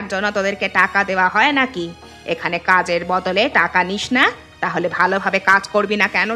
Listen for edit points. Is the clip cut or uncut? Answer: uncut